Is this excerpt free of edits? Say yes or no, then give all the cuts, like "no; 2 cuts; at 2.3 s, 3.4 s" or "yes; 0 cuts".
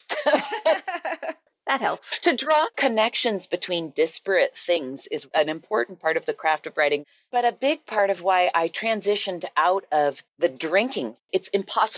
no; 3 cuts; at 1.2 s, 7.0 s, 11.3 s